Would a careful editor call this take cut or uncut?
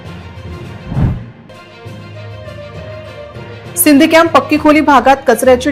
uncut